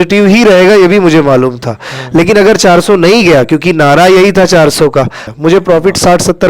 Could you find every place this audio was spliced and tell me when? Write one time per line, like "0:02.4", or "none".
0:05.2